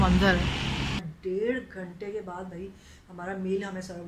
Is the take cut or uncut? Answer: cut